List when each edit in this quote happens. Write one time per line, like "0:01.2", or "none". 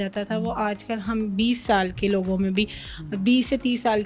none